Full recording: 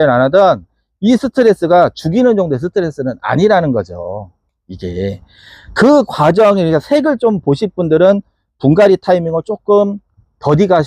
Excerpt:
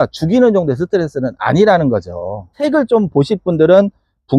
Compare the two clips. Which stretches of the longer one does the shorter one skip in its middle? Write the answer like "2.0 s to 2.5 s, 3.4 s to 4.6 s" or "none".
4.4 s to 6.9 s